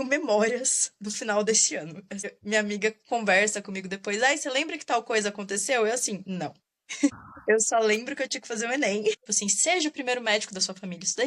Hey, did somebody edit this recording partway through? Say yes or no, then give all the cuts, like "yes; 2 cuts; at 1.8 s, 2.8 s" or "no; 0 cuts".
yes; 1 cut; at 9.3 s